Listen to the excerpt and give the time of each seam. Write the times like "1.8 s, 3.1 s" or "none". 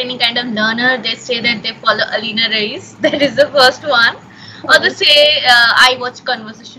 none